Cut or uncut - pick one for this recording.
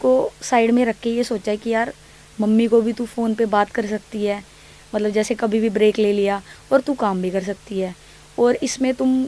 uncut